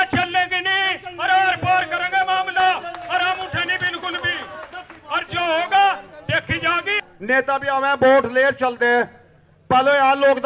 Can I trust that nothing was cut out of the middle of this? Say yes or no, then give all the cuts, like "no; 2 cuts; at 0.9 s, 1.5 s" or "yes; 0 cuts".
no; 1 cut; at 7.1 s